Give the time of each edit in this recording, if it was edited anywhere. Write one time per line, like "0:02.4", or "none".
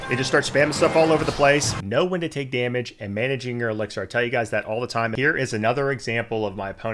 0:01.8
0:05.1